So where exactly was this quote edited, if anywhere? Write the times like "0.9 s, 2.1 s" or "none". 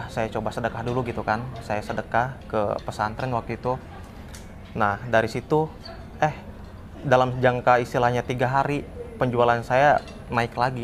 none